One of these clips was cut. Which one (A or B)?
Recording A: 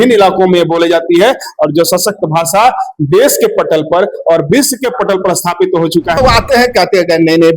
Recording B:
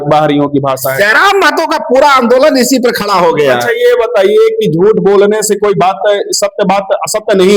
A